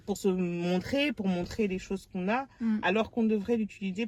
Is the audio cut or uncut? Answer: uncut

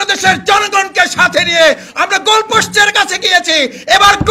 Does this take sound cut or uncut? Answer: uncut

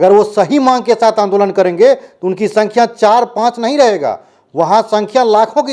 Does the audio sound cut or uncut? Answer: uncut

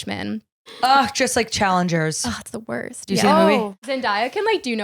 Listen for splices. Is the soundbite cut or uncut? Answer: cut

